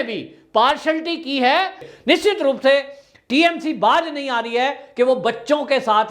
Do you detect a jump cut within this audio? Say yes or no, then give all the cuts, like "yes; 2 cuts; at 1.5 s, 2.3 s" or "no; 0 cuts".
yes; 1 cut; at 1.9 s